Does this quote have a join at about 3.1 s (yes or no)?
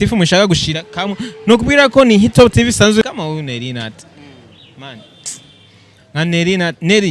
yes